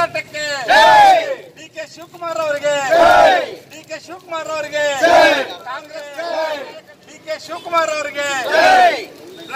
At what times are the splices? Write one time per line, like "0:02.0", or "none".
0:06.0

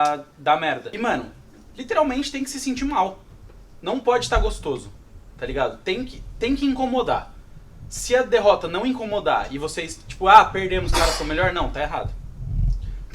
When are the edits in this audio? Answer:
0:01.0

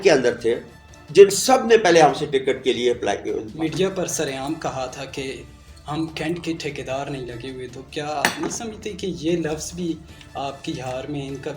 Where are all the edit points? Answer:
0:03.5

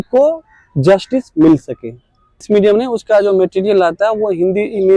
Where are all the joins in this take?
0:02.4

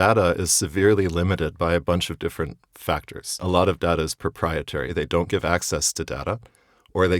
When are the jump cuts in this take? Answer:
0:03.4
0:04.9

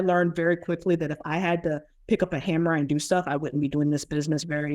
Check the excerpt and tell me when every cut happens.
0:01.9

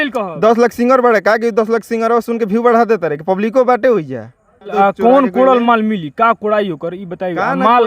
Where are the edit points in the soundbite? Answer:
0:04.7

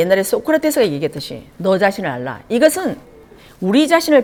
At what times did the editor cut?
none

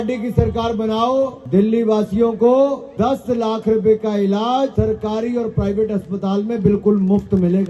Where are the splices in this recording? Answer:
0:01.4
0:02.8
0:04.7

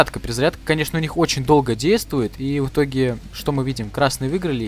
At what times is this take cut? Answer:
none

